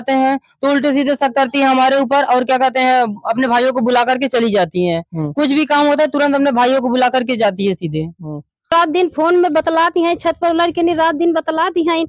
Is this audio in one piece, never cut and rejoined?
no; 1 cut; at 8.7 s

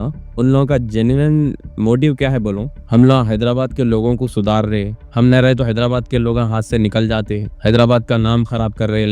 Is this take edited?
no; 0 cuts

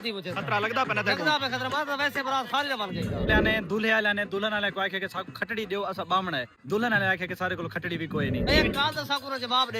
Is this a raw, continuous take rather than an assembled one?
no; 2 cuts; at 3.3 s, 8.5 s

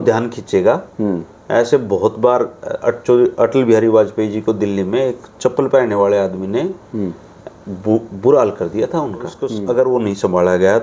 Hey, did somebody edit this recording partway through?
yes; 1 cut; at 9.6 s

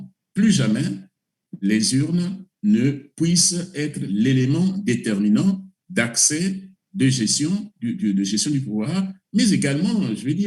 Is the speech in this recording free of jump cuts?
yes; 0 cuts

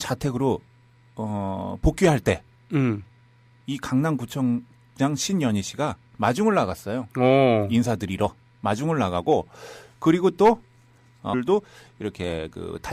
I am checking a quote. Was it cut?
no; 0 cuts

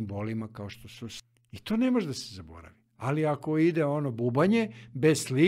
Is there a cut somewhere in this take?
yes; 1 cut; at 1.2 s

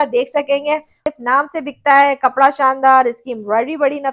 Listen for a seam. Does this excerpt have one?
yes; 1 cut; at 0.9 s

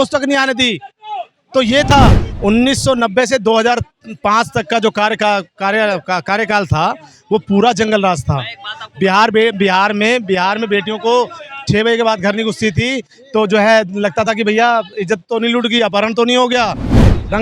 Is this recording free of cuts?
no; 1 cut; at 2.3 s

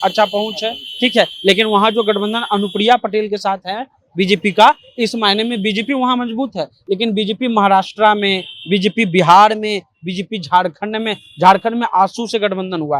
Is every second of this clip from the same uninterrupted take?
yes; 0 cuts

